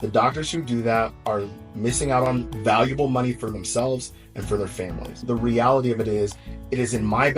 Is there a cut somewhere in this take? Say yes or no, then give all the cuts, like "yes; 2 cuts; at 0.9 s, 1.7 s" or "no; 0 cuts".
yes; 2 cuts; at 2.5 s, 5.1 s